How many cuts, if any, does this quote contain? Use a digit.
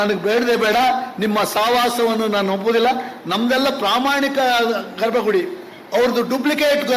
0